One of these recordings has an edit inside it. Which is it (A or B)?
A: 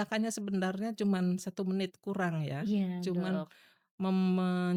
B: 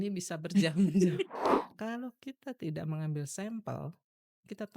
B